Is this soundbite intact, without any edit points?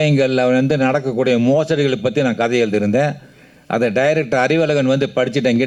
yes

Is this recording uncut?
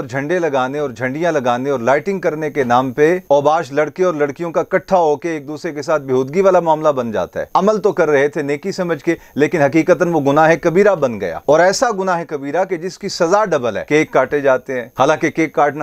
no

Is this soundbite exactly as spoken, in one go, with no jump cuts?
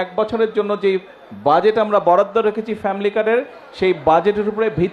yes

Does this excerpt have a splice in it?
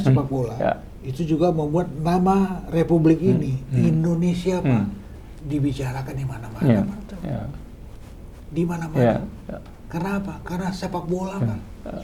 no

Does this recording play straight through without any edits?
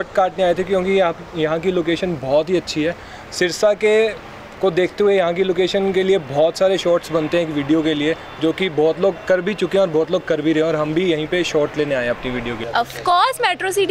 yes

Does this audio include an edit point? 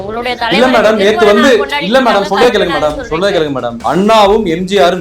yes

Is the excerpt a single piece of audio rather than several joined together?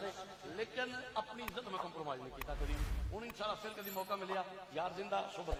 yes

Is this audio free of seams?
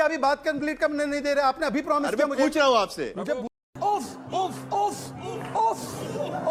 yes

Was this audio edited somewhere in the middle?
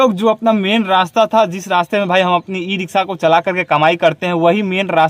no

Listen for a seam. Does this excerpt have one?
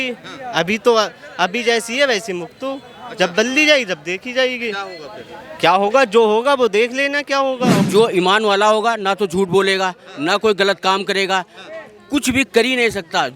yes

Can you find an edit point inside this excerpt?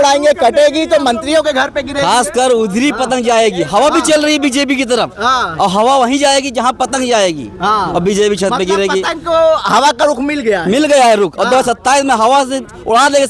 no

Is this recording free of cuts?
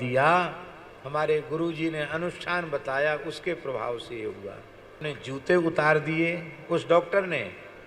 no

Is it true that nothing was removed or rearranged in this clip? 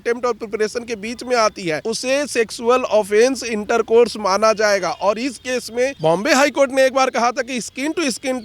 no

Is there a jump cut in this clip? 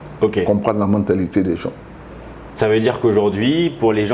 no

